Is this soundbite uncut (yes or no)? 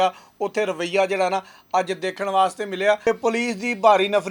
no